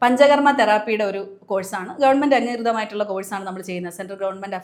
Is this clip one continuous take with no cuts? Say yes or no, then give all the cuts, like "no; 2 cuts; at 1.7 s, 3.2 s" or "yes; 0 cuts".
yes; 0 cuts